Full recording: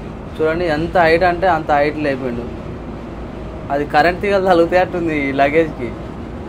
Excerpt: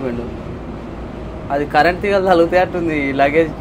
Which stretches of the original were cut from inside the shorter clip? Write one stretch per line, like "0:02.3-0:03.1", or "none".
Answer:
none

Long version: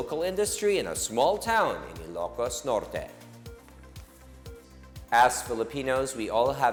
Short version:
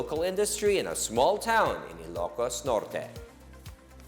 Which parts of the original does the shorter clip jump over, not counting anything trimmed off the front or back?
0:03.1-0:03.4

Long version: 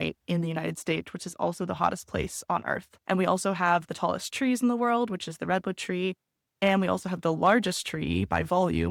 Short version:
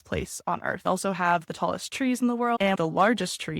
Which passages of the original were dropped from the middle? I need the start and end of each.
0:02.9-0:03.3
0:05.0-0:07.0

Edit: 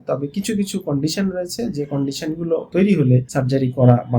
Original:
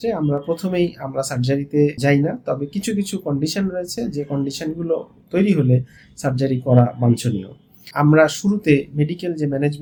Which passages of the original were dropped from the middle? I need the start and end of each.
0:05.0-0:05.2
0:05.9-0:06.2

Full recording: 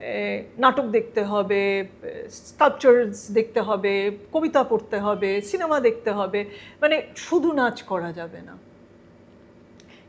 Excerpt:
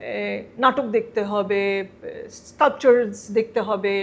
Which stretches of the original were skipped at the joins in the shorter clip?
none

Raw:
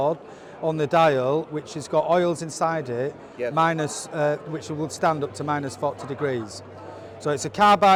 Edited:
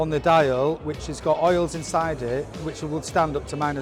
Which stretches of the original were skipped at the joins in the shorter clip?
0:03.3-0:04.5

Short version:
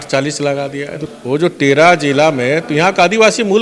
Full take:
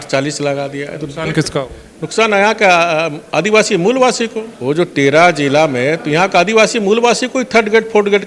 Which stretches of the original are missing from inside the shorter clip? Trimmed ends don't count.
0:01.1-0:04.5

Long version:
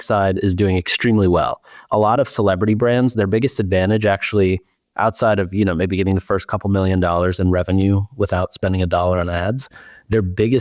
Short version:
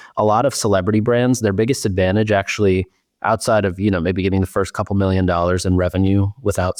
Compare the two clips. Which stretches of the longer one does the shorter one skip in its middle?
none

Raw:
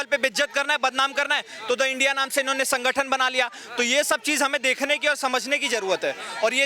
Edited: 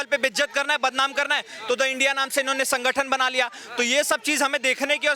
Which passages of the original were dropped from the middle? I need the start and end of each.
none

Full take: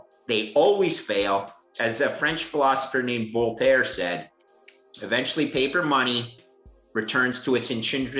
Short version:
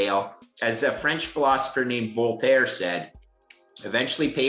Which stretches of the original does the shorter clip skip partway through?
none

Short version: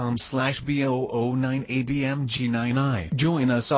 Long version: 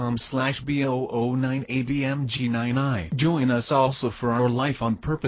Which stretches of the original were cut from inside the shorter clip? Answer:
none

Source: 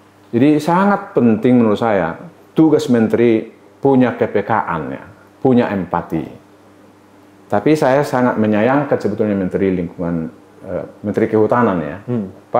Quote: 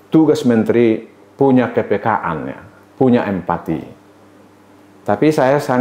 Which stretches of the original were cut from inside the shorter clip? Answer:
none

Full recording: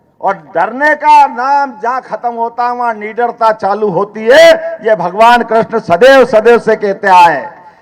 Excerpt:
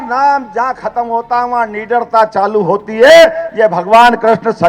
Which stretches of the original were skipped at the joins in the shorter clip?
none

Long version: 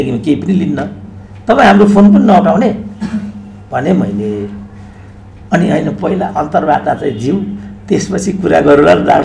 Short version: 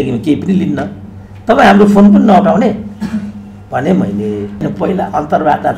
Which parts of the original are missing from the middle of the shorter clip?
0:04.6-0:05.8

